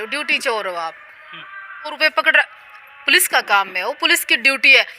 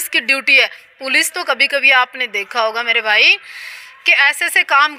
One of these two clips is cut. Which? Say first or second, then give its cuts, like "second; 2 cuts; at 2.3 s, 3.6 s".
first; 1 cut; at 1.9 s